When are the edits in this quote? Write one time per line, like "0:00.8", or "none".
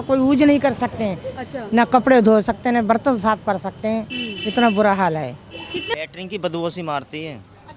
0:05.8